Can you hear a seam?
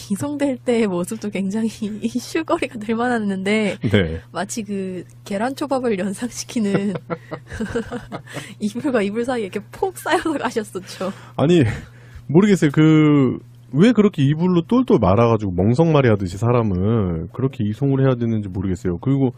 no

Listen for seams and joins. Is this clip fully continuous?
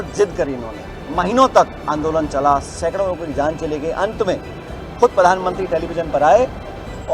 yes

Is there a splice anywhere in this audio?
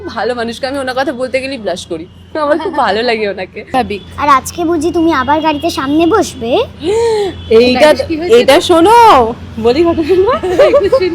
yes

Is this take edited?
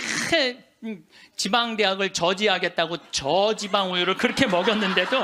no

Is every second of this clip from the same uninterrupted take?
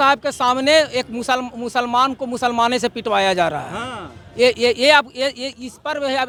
yes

